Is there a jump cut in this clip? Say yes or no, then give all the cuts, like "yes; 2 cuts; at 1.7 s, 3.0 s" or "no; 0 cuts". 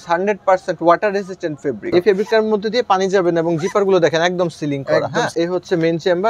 yes; 2 cuts; at 1.8 s, 5.3 s